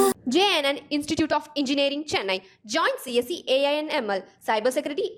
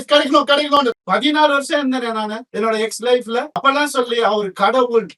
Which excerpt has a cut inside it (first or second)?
second